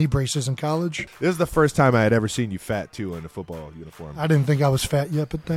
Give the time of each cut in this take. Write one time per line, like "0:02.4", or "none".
0:01.1
0:04.2